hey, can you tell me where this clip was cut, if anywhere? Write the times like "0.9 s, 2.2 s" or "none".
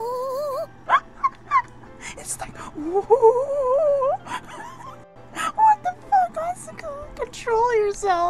5.0 s